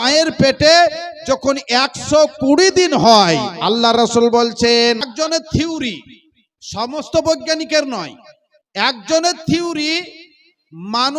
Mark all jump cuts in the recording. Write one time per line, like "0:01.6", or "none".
0:05.1

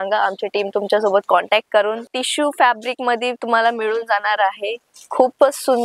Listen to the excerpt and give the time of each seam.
0:02.1

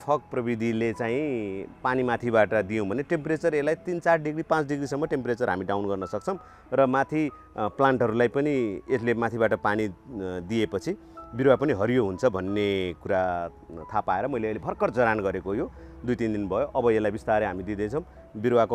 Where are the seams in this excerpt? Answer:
none

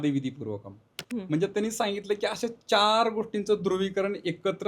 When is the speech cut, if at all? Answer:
none

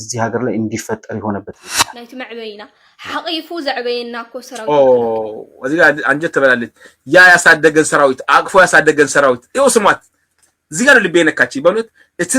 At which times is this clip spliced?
0:02.0

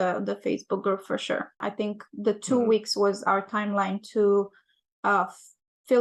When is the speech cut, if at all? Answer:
0:01.7

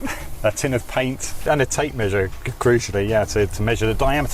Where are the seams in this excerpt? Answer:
0:01.5

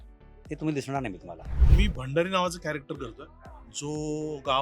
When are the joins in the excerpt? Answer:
0:01.5

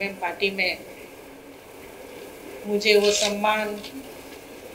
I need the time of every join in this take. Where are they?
none

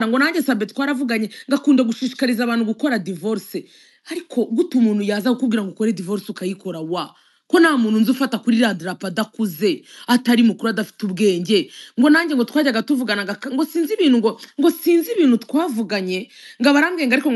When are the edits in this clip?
none

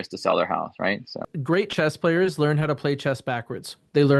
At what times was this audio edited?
0:01.3

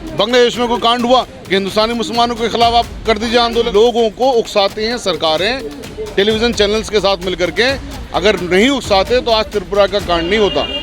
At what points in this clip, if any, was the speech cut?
0:03.7

